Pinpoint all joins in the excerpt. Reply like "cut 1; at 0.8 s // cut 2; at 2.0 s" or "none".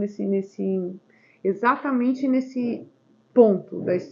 none